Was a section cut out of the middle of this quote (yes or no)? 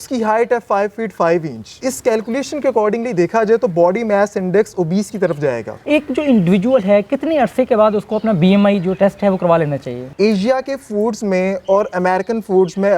yes